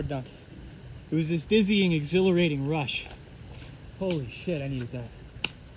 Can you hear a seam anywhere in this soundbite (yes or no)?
no